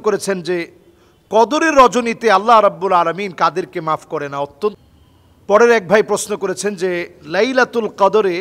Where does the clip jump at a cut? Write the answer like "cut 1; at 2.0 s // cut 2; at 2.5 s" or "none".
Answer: cut 1; at 4.8 s

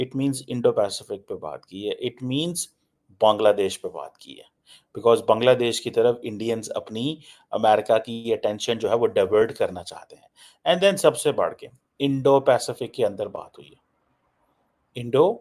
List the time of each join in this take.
none

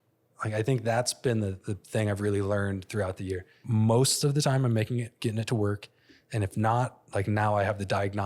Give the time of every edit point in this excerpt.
cut 1; at 3.5 s

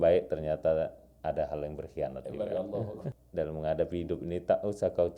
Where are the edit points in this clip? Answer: cut 1; at 3.0 s

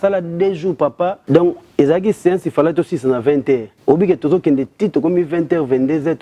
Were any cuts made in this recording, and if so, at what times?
cut 1; at 1.2 s // cut 2; at 3.7 s

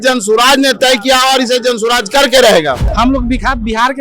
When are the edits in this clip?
cut 1; at 2.9 s

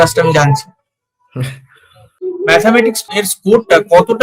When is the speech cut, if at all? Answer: cut 1; at 2.1 s // cut 2; at 3.1 s

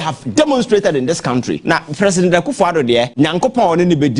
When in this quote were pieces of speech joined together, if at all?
cut 1; at 1.6 s // cut 2; at 3.1 s

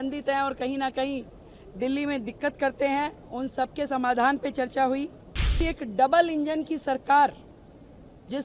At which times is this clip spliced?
cut 1; at 5.6 s

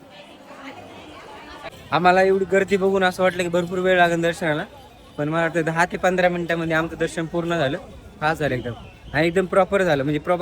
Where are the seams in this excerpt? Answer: cut 1; at 1.7 s

